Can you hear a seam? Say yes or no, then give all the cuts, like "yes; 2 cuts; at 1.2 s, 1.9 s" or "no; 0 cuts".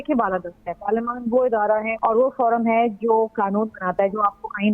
yes; 1 cut; at 1.9 s